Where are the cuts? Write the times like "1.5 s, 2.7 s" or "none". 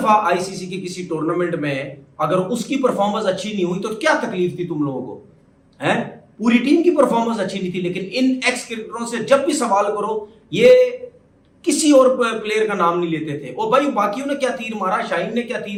none